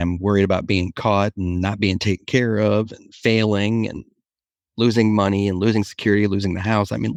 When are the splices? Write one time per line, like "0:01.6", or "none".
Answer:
none